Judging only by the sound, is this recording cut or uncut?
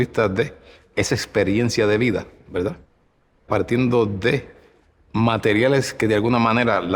cut